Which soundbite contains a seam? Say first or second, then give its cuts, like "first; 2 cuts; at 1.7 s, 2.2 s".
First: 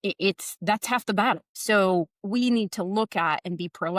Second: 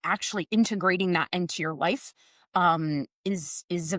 first; 1 cut; at 1.5 s